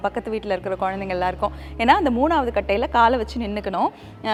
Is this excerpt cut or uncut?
uncut